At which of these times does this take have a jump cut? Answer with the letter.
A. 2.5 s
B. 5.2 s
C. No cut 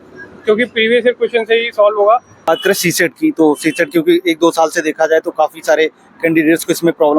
A